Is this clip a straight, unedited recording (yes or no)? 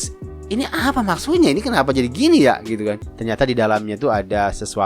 no